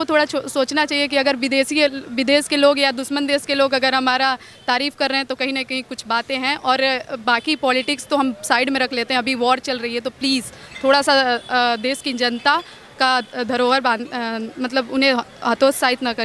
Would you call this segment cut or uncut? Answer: uncut